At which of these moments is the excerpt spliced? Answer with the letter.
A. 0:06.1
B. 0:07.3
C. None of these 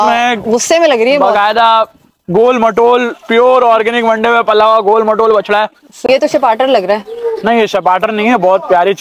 A